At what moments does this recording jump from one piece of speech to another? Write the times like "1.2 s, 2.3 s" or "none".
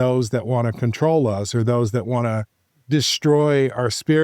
none